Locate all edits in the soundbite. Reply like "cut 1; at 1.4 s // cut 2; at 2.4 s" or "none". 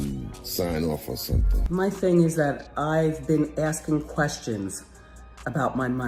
cut 1; at 1.5 s